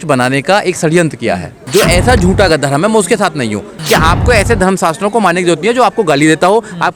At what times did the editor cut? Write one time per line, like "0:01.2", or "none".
0:01.6
0:03.8